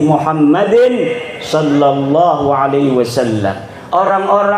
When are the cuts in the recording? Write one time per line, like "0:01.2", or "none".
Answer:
none